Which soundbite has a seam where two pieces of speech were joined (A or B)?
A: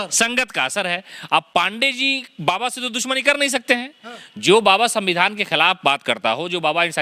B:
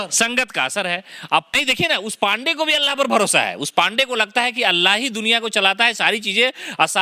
B